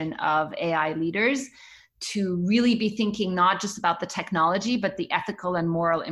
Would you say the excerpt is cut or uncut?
uncut